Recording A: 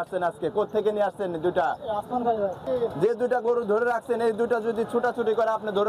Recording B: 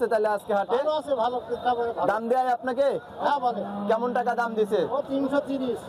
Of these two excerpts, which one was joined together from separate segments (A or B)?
A